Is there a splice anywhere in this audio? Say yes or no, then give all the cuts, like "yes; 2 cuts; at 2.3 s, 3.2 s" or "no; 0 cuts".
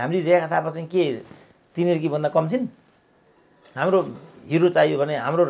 no; 0 cuts